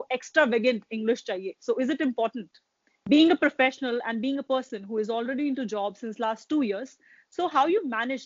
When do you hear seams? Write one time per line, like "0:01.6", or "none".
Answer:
0:02.9